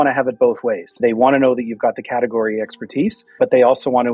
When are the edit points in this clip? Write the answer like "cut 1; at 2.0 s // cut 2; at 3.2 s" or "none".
cut 1; at 1.0 s // cut 2; at 3.4 s

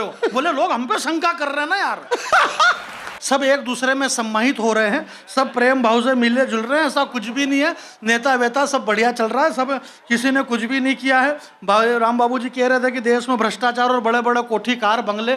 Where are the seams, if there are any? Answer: cut 1; at 3.2 s

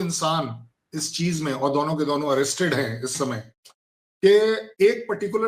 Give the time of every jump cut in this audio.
none

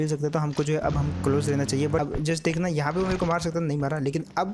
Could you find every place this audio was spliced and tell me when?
cut 1; at 2.0 s

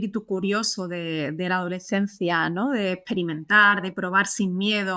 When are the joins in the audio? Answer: none

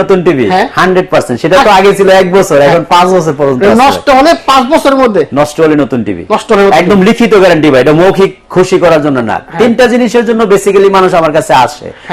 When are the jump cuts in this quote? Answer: none

